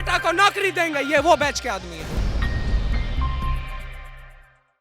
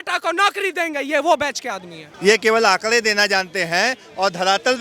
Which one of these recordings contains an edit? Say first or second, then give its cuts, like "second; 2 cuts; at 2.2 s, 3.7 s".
second; 1 cut; at 2.0 s